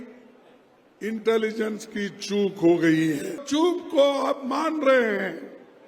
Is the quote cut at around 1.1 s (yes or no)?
no